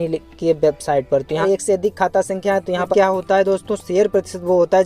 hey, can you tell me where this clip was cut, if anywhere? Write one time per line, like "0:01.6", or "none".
0:01.4
0:02.9